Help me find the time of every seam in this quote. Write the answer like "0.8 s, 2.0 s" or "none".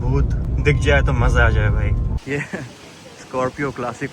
2.1 s